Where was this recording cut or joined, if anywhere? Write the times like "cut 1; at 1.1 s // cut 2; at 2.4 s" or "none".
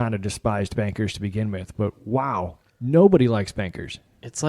cut 1; at 2.7 s